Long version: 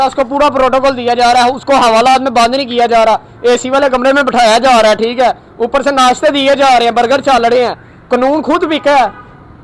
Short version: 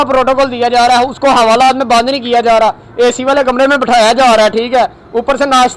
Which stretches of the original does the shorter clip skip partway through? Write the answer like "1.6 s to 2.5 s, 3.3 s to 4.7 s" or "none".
none